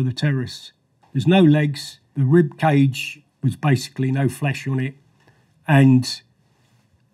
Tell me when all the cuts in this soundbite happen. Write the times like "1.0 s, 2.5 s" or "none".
1.0 s, 2.1 s